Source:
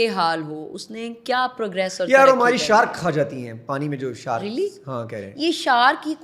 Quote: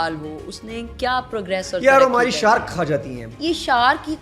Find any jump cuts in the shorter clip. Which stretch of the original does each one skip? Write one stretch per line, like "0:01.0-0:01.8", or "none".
0:03.5-0:05.2